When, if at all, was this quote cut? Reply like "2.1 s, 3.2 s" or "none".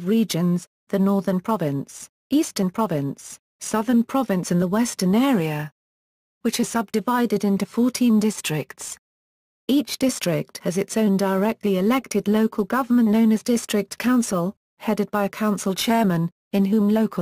none